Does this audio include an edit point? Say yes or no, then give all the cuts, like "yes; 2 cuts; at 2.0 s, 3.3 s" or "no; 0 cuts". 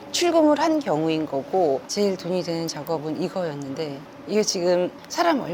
yes; 1 cut; at 1.8 s